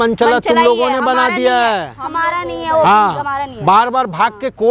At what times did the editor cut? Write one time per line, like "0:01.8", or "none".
none